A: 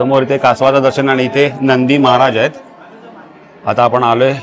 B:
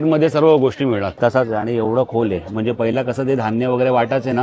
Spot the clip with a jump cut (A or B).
B